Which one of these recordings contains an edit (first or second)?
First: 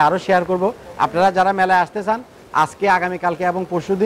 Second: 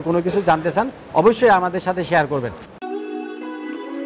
second